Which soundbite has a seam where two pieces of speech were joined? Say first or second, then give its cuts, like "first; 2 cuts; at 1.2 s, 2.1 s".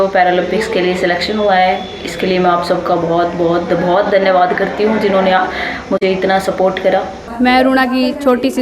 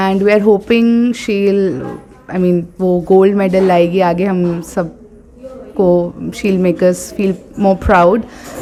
first; 1 cut; at 7.2 s